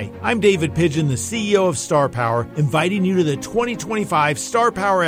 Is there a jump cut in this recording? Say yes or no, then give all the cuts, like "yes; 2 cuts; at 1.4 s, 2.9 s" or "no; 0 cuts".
no; 0 cuts